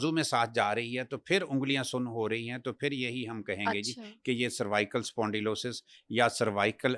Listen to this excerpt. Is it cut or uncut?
uncut